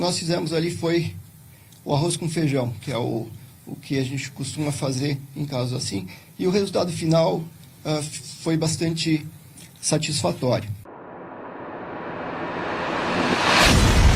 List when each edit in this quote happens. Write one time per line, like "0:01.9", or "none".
0:10.9